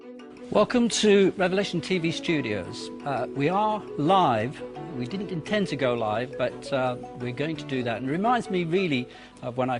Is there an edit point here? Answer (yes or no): no